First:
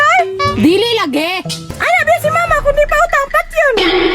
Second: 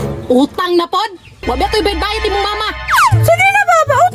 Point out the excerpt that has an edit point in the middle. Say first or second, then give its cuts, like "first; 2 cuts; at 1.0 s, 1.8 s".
first; 1 cut; at 1.5 s